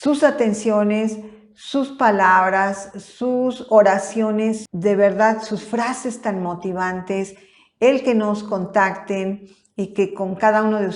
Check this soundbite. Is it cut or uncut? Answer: cut